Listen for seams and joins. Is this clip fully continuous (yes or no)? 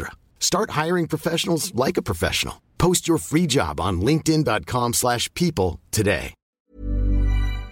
no